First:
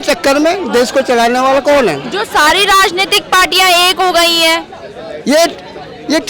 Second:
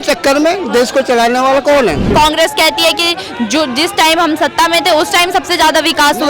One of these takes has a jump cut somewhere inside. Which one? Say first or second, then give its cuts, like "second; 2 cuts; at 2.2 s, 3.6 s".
second; 1 cut; at 2.1 s